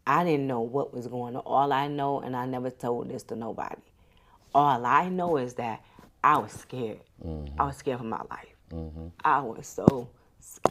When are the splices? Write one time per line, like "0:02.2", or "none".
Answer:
none